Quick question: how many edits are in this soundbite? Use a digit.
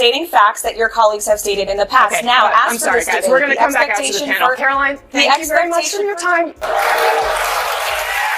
1